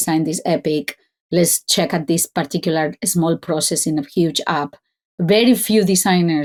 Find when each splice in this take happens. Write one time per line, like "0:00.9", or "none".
none